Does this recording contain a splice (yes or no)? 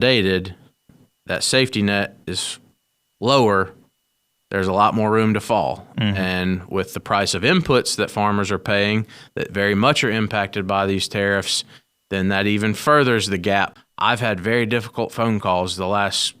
yes